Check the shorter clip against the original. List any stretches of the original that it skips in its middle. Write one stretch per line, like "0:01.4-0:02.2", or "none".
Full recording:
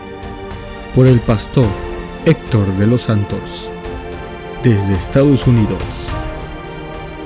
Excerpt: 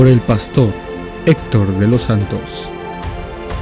none